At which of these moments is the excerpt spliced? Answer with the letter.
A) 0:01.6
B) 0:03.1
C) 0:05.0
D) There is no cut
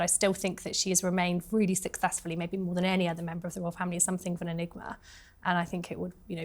D